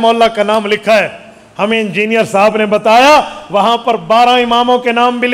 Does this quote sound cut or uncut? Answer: uncut